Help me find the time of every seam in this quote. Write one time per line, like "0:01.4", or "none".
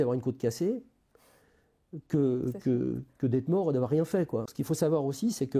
0:04.5